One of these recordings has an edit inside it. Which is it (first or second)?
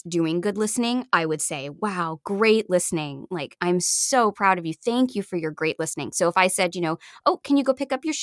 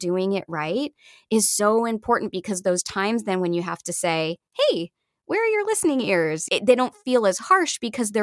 second